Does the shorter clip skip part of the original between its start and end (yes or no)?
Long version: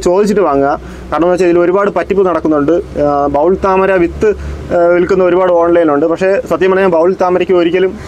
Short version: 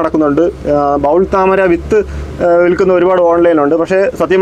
no